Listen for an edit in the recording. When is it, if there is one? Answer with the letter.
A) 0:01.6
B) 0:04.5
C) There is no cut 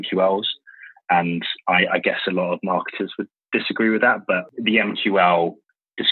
B